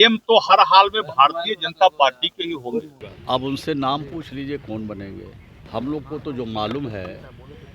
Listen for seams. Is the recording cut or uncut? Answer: cut